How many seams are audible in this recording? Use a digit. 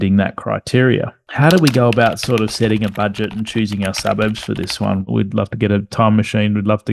2